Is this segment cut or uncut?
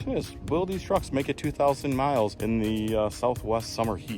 cut